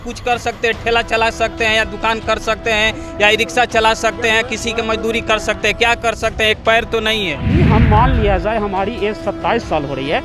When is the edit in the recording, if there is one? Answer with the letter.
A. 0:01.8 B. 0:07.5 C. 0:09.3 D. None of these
B